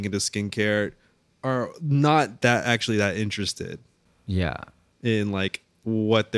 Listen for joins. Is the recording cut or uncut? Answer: cut